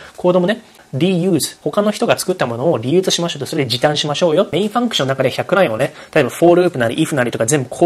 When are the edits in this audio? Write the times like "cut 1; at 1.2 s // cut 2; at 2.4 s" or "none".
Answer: cut 1; at 0.8 s // cut 2; at 4.5 s